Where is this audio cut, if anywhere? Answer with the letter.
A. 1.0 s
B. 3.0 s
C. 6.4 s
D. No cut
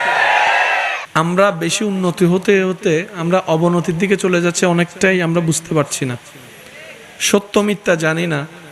A